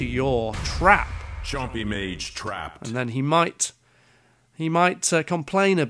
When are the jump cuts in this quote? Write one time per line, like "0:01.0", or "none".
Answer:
none

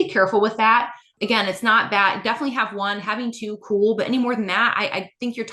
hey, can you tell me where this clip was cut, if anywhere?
0:01.1

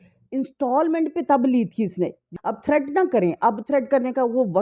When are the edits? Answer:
0:02.3

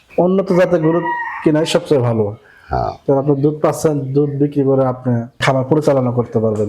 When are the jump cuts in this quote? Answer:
0:05.4

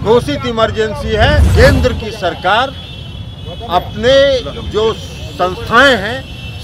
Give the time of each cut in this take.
0:01.5

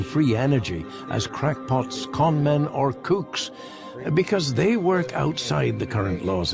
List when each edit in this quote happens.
0:04.7

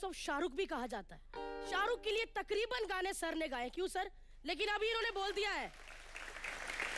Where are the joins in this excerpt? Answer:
none

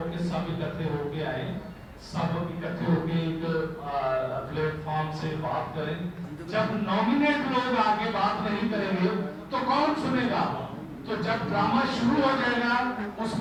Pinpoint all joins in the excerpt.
none

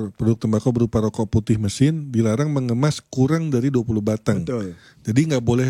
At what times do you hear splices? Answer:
none

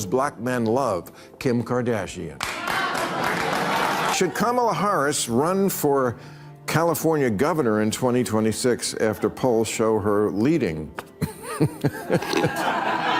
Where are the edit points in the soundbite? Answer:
0:04.0

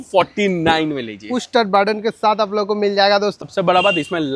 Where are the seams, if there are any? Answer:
0:03.4

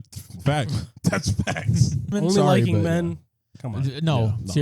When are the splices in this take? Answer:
0:02.1

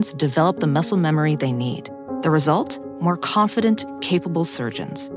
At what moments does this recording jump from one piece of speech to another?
none

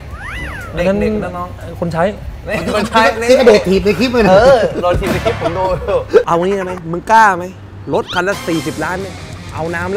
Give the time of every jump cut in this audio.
0:06.3

